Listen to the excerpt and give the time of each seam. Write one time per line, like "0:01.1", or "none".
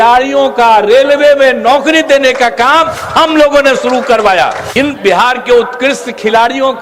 0:04.7